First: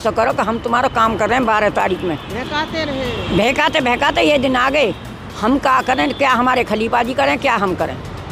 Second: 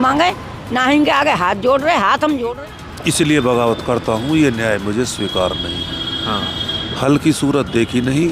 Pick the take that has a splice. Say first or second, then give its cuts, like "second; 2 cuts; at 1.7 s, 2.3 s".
second; 1 cut; at 2.5 s